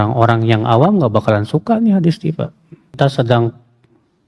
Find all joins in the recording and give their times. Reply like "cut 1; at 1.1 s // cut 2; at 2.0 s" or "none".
cut 1; at 2.9 s

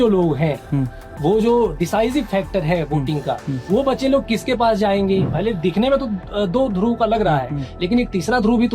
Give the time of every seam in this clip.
cut 1; at 5.3 s

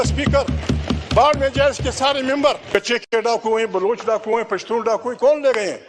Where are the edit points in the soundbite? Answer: cut 1; at 2.6 s

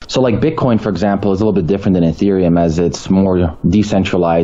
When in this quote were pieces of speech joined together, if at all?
none

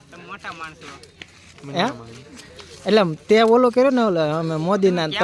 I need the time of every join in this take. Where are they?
none

